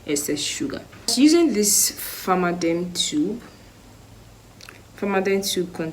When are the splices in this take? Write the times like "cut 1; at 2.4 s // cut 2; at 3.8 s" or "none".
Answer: cut 1; at 1.1 s